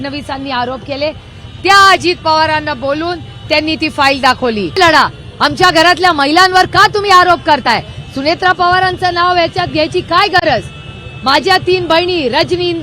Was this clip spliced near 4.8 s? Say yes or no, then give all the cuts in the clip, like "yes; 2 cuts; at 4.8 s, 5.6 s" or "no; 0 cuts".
yes; 1 cut; at 4.8 s